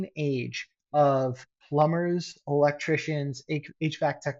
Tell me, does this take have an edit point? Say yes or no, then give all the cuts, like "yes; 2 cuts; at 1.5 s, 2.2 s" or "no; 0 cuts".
no; 0 cuts